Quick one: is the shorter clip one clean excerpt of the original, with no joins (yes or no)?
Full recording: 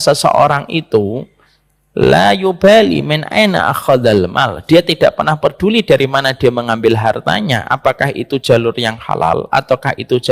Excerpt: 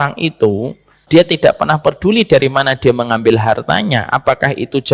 no